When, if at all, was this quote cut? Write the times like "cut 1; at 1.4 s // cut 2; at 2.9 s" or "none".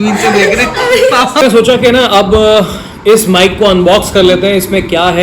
cut 1; at 1.4 s